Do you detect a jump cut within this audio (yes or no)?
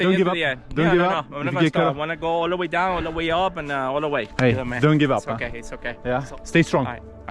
yes